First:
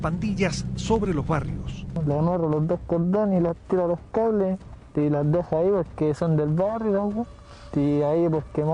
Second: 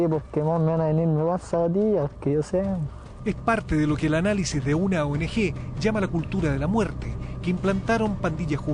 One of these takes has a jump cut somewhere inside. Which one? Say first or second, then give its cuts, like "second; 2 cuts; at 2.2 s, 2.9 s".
first; 1 cut; at 1.8 s